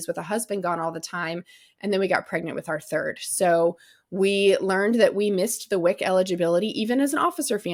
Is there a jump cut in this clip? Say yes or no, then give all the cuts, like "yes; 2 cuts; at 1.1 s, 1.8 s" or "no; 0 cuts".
no; 0 cuts